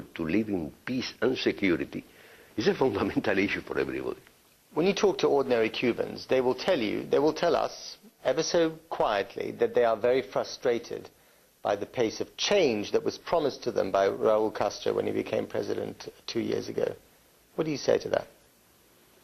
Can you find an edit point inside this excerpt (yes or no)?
yes